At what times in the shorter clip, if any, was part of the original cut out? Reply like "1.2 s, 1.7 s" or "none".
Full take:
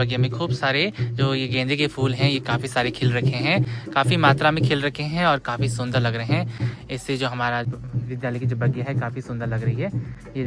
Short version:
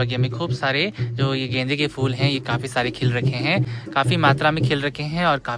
none